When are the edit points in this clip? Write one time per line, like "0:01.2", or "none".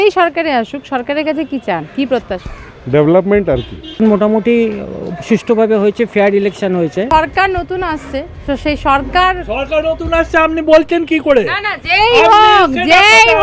0:03.8
0:07.1